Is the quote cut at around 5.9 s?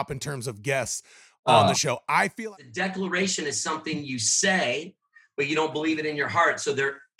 no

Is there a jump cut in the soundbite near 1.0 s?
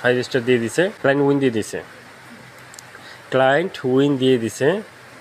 yes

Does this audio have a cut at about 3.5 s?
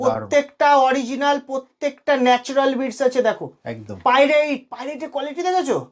no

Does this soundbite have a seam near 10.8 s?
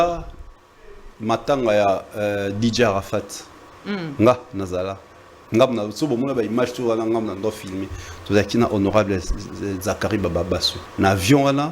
yes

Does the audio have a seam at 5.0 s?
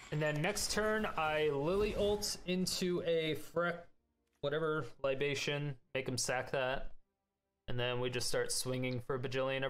no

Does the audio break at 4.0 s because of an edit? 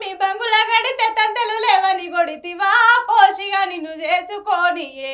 no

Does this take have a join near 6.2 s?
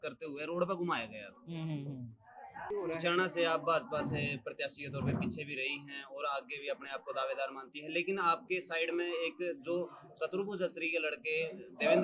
no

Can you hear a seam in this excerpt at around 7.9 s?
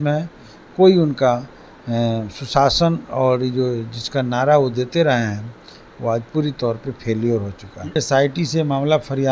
yes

